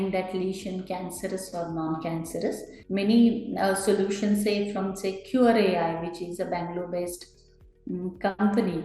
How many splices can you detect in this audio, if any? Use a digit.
1